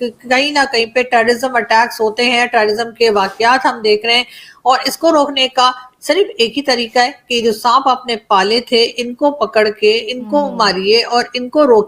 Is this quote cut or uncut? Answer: uncut